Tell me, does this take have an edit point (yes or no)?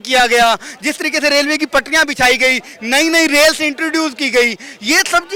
no